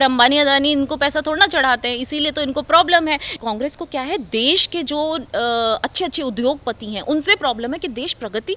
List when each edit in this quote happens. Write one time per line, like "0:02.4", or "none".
none